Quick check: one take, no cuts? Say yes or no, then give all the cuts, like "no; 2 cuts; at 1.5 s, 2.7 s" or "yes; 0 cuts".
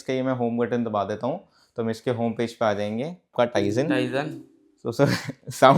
no; 1 cut; at 3.3 s